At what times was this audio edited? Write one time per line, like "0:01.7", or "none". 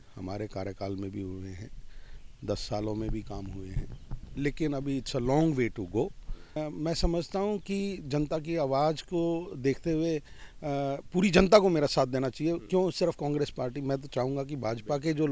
0:06.6